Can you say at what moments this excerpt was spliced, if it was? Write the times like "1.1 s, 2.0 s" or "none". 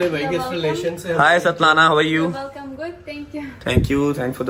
none